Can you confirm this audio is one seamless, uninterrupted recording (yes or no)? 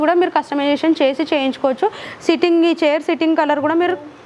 yes